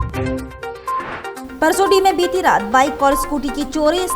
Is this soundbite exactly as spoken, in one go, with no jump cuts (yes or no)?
no